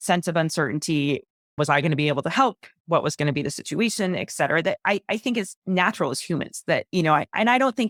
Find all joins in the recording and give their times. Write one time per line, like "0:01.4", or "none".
none